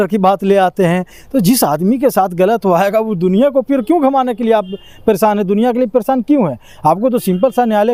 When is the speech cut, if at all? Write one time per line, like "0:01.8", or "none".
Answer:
none